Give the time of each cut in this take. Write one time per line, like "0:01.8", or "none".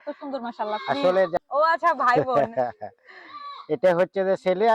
0:01.4